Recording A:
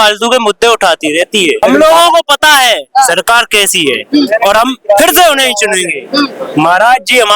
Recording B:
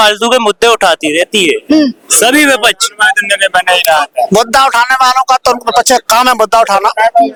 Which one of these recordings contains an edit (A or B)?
A